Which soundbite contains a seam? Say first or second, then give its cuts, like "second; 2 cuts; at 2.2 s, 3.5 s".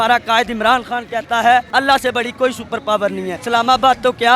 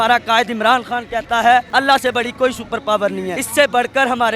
first; 1 cut; at 3.4 s